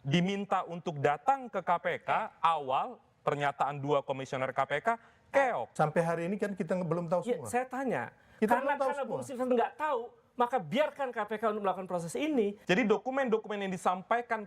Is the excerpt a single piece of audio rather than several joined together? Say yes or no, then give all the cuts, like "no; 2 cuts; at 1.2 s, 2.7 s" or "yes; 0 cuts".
no; 2 cuts; at 5.7 s, 12.6 s